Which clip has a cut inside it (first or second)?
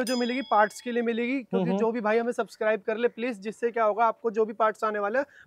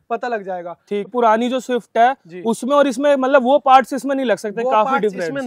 second